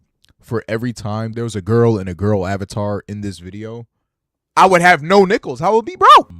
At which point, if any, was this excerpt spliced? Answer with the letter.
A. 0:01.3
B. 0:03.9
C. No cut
A